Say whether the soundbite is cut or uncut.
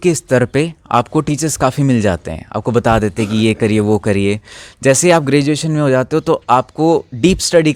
uncut